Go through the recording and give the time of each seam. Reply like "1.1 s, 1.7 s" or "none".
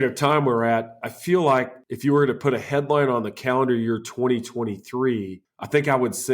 1.0 s, 1.8 s